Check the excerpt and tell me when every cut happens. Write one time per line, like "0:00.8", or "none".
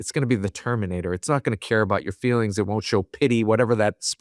none